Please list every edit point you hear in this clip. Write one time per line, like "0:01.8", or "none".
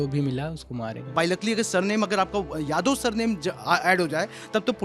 0:01.1